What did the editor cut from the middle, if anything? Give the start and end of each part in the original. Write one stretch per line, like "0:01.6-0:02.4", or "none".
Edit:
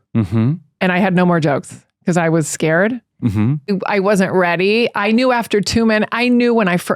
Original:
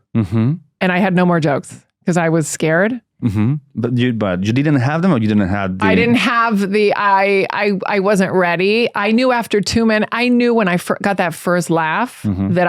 0:03.7-0:07.7